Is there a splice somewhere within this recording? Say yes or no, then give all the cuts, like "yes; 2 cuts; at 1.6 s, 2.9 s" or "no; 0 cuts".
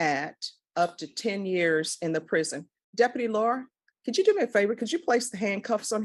no; 0 cuts